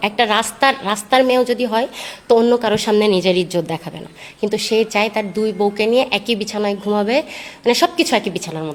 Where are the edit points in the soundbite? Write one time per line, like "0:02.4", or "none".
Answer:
none